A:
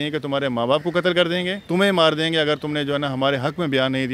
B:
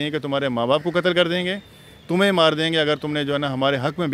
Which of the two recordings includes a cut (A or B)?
A